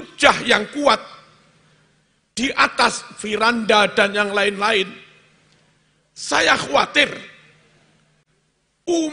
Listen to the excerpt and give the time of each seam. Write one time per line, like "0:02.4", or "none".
none